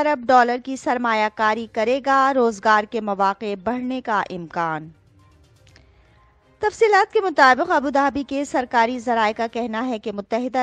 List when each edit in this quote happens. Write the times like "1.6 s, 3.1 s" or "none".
none